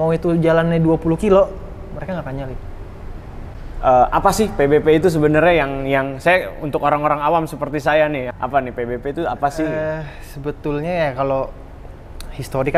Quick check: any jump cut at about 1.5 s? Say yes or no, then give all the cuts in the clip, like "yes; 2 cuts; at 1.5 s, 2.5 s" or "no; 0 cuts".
no; 2 cuts; at 3.6 s, 8.3 s